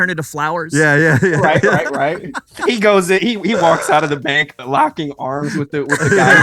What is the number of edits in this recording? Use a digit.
0